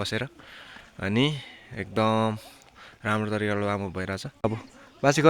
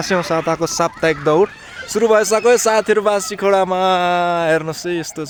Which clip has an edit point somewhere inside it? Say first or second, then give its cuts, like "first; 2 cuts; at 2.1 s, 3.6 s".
first; 1 cut; at 4.3 s